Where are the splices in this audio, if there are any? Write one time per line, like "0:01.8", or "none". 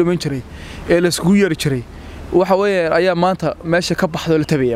none